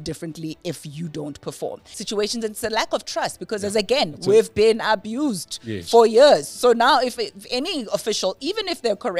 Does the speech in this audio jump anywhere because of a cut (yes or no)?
yes